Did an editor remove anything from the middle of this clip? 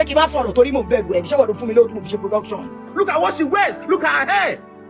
yes; 1 cut; at 2.9 s

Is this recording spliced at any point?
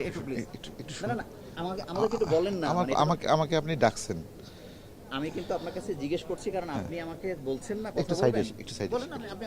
no; 0 cuts

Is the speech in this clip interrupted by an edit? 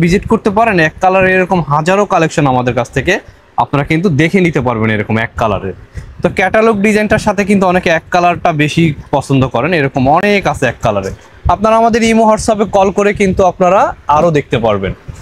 no; 0 cuts

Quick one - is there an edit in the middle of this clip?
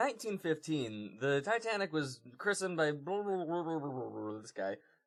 no; 0 cuts

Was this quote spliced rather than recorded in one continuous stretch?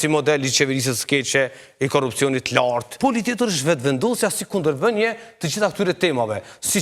yes; 1 cut; at 3.0 s

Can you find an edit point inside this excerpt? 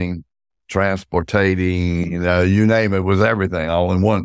no; 0 cuts

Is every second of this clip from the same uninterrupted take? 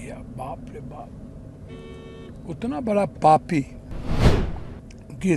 yes; 0 cuts

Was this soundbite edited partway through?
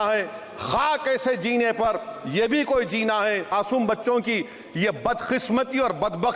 yes; 1 cut; at 3.5 s

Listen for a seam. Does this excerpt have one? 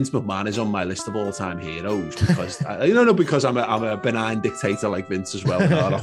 yes; 1 cut; at 4.0 s

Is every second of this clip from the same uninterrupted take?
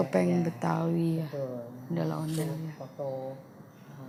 yes; 0 cuts

